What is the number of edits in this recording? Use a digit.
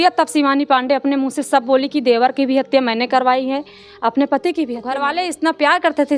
1